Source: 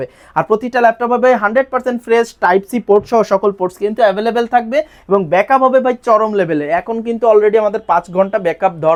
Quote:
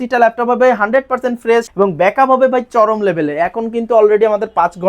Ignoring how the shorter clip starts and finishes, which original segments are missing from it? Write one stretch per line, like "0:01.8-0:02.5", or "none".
0:02.3-0:05.0